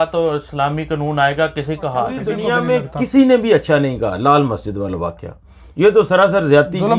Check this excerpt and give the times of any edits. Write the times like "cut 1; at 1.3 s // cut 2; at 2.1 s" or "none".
cut 1; at 2.3 s

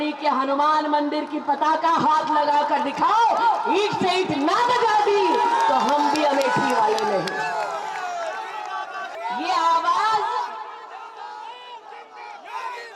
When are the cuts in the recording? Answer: cut 1; at 9.1 s

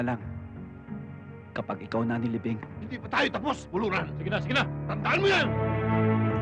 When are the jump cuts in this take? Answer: cut 1; at 2.8 s // cut 2; at 5.6 s

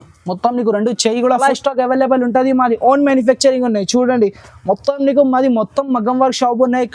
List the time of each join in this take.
cut 1; at 1.4 s

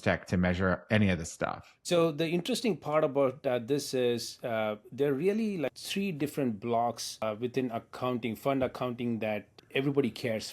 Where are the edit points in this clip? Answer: cut 1; at 1.9 s // cut 2; at 5.8 s // cut 3; at 7.2 s // cut 4; at 9.5 s

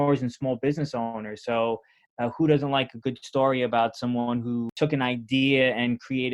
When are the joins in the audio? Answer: cut 1; at 4.7 s

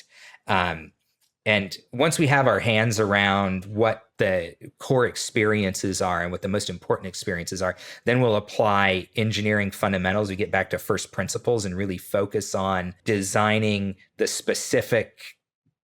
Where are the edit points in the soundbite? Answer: cut 1; at 13.0 s

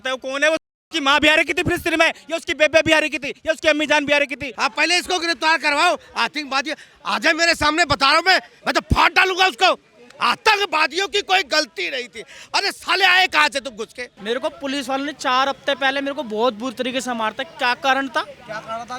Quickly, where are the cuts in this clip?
cut 1; at 4.4 s // cut 2; at 14.1 s

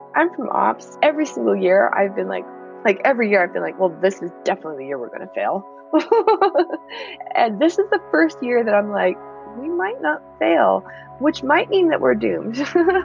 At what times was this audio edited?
cut 1; at 2.6 s

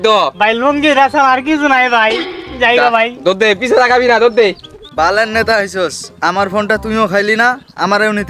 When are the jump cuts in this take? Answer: cut 1; at 4.7 s

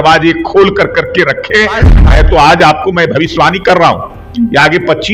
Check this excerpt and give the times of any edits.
cut 1; at 1.9 s

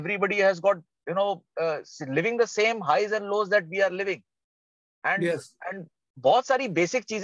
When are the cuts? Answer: none

